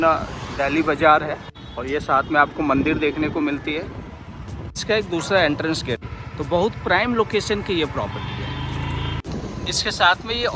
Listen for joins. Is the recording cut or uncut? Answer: uncut